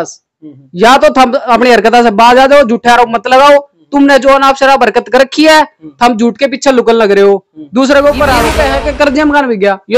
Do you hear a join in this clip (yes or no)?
yes